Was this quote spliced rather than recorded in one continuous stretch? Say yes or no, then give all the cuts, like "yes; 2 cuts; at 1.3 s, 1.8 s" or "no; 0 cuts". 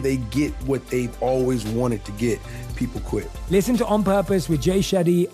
no; 0 cuts